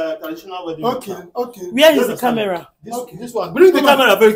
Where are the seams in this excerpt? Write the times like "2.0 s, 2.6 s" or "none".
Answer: none